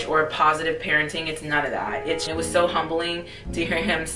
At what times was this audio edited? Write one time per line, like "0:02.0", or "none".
0:02.3